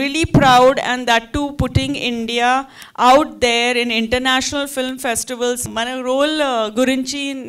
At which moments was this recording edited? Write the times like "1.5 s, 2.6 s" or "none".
5.6 s